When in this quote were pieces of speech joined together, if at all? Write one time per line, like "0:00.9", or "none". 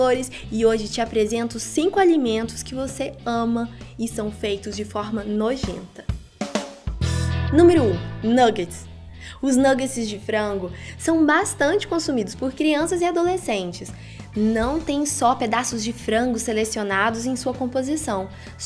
0:06.0